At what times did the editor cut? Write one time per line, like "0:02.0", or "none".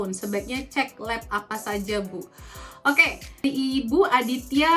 0:03.5